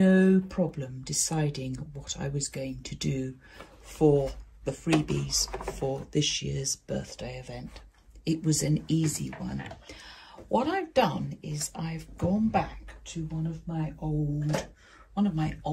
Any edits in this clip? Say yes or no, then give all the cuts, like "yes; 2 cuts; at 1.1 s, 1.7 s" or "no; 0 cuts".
no; 0 cuts